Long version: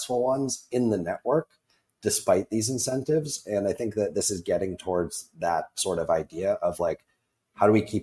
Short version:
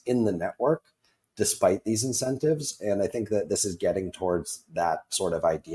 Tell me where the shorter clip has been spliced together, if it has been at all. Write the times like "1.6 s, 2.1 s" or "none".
none